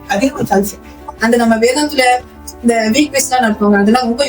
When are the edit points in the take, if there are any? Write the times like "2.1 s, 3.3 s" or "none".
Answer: 1.1 s